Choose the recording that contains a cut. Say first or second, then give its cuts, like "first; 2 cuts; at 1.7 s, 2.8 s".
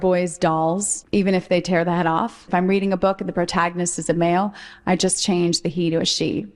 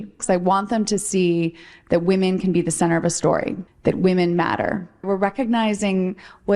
first; 2 cuts; at 0.9 s, 2.4 s